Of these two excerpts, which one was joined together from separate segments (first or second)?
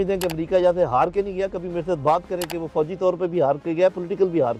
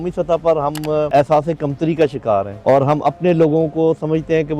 second